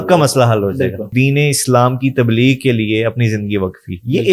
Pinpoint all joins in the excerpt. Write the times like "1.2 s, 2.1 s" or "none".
1.1 s